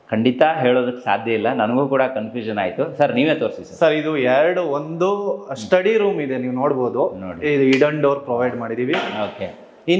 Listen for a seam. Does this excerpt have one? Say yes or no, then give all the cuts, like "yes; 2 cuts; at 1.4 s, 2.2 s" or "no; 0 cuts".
no; 0 cuts